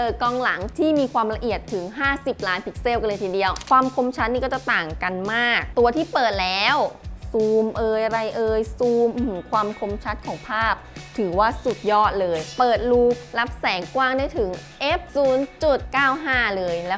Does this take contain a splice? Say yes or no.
yes